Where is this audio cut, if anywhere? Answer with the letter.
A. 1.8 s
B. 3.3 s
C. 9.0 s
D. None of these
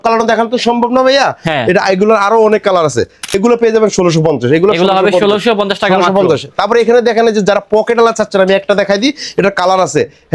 B